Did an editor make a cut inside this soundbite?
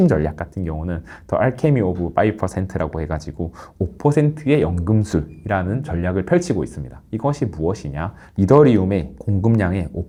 no; 0 cuts

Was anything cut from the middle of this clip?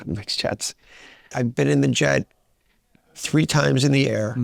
yes; 1 cut; at 1.3 s

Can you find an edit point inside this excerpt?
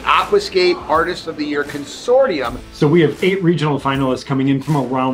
yes; 1 cut; at 2.6 s

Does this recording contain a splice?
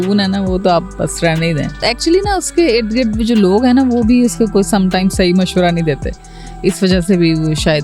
yes; 1 cut; at 1.8 s

